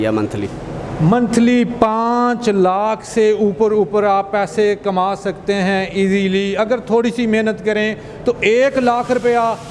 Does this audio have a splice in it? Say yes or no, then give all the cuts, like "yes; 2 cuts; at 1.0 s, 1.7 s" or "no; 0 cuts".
no; 0 cuts